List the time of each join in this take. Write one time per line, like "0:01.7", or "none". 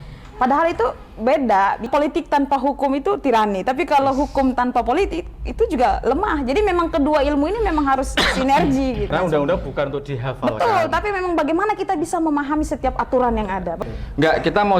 0:01.9
0:09.1
0:13.8